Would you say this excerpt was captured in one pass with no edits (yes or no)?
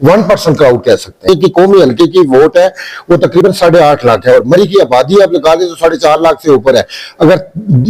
no